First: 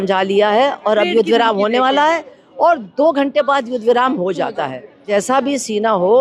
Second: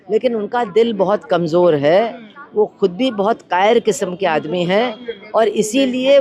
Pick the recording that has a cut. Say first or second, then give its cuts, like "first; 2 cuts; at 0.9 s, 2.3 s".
first; 1 cut; at 4.9 s